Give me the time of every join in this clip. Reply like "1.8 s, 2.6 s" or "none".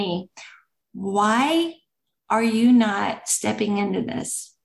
none